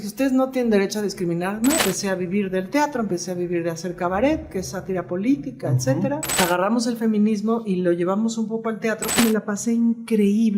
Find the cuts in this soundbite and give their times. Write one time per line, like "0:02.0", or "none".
0:01.8
0:06.4
0:09.2